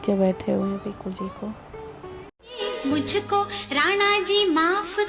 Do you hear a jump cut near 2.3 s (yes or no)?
yes